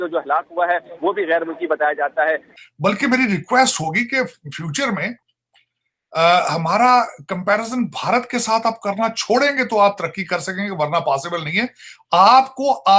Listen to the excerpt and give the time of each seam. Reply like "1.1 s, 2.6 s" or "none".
2.5 s